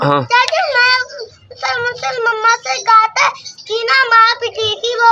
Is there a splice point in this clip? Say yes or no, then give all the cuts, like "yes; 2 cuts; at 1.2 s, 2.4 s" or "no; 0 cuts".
no; 0 cuts